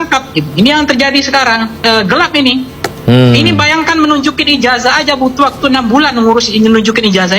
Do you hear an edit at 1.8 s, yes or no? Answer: yes